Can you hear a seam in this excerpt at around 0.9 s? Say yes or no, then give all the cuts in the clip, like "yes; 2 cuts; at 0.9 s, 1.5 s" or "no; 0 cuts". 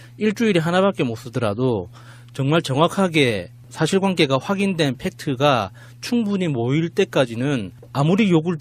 yes; 1 cut; at 0.9 s